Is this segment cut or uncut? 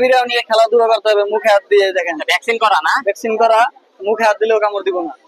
uncut